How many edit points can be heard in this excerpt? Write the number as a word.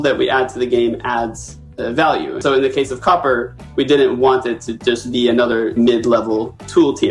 two